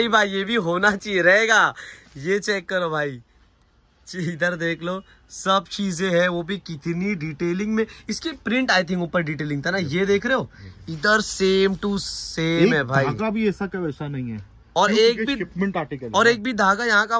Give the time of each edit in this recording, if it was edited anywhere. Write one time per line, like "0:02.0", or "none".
none